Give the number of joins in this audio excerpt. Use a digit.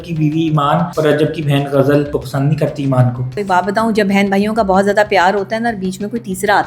3